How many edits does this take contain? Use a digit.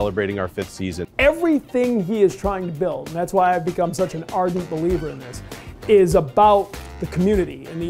1